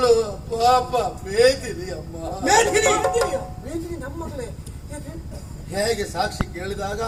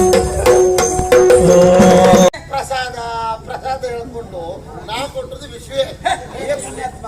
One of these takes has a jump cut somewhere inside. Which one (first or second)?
second